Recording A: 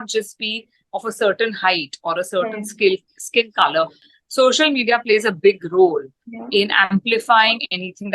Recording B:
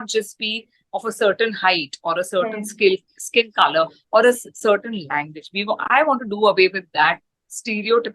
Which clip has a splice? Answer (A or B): A